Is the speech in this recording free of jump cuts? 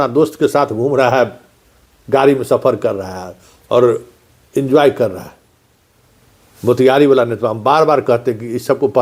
yes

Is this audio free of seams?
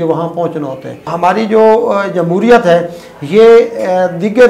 no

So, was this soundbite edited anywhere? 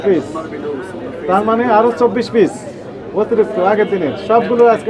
no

